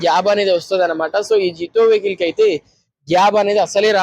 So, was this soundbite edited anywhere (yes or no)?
no